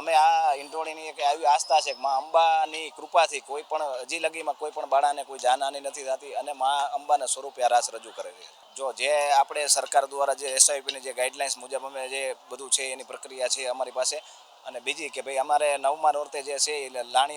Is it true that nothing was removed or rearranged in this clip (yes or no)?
yes